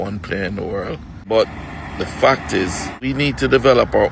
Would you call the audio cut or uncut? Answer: cut